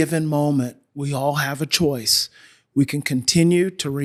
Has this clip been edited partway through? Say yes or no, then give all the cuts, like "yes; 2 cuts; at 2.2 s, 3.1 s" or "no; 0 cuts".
no; 0 cuts